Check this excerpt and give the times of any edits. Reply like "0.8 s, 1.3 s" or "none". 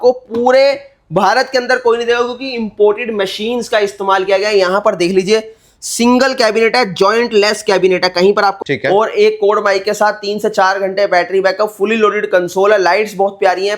8.6 s